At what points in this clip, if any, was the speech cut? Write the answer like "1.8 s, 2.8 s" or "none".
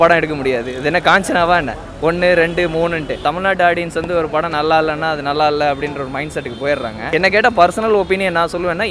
3.2 s, 7.1 s